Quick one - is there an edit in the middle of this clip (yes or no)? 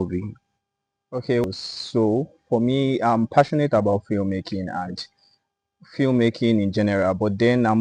yes